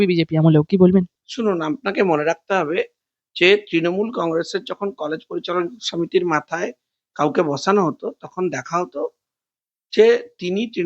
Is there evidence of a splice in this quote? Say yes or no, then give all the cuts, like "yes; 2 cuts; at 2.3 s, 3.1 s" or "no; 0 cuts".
no; 0 cuts